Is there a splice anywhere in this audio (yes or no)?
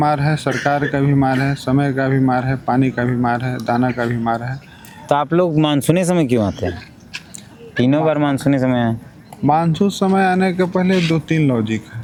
no